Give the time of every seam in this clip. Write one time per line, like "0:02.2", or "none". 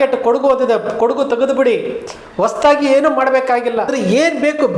0:03.9